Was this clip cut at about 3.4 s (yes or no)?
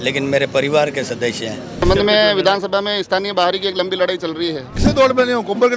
no